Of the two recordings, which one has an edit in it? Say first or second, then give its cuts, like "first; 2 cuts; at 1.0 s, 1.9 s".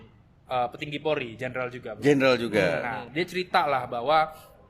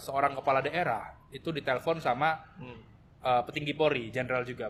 first; 1 cut; at 3.0 s